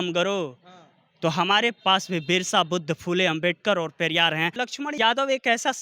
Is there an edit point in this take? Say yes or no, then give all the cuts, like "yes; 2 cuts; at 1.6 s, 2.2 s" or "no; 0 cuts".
yes; 1 cut; at 4.7 s